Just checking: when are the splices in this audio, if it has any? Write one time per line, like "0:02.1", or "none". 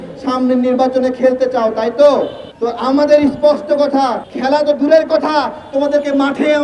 0:02.4
0:04.3